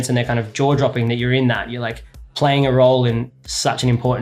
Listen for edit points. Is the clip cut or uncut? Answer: cut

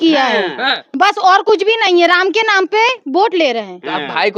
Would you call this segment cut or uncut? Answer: uncut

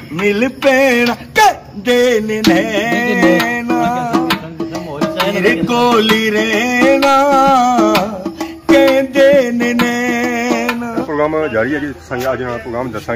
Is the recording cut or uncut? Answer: cut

